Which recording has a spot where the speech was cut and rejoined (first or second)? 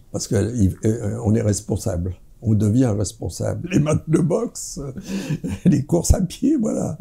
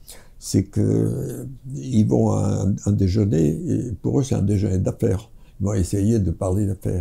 first